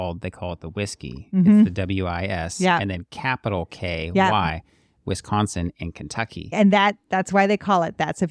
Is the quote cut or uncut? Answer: cut